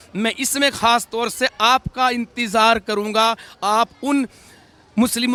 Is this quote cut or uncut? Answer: uncut